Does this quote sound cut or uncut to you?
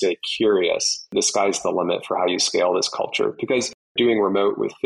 cut